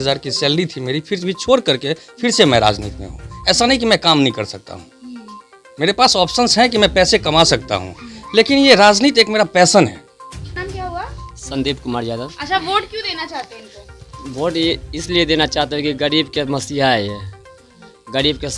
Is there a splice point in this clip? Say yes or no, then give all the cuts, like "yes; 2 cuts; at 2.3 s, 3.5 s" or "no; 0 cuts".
yes; 1 cut; at 10.6 s